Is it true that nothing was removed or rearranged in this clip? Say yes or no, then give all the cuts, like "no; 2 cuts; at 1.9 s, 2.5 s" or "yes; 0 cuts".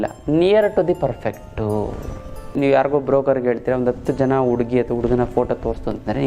no; 1 cut; at 2.5 s